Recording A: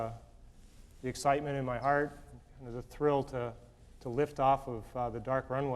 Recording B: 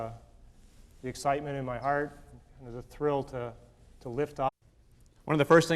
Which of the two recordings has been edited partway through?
A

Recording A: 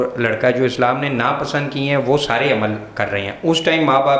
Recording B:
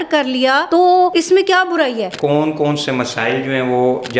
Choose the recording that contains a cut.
B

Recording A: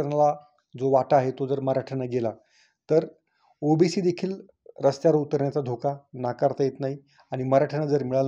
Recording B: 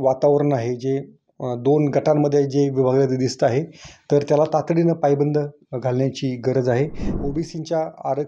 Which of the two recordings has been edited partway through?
B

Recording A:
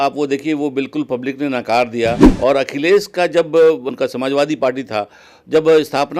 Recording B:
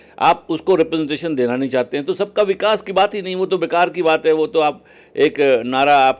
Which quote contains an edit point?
A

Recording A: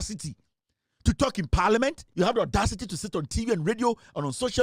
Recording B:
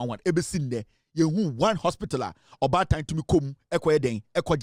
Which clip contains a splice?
A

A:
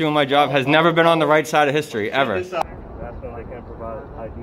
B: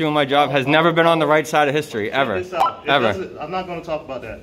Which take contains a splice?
A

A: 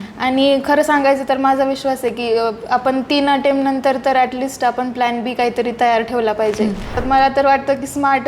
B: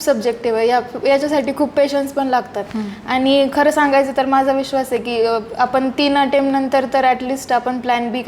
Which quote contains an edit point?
A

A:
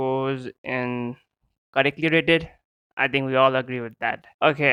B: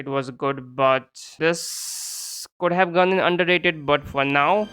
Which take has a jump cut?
B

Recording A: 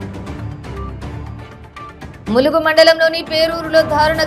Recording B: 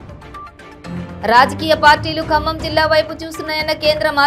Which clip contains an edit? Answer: A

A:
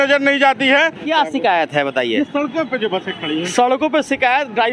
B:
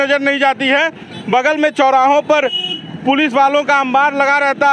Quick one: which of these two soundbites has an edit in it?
A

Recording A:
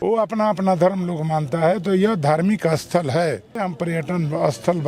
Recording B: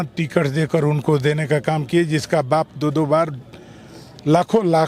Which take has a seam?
A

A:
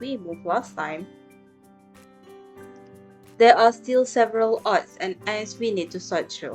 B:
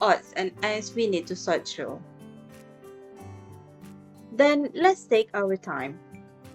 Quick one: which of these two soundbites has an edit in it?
A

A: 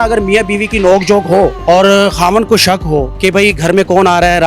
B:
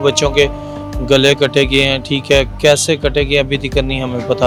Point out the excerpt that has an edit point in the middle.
A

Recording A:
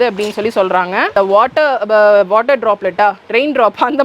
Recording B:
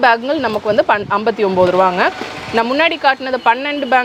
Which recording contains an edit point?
A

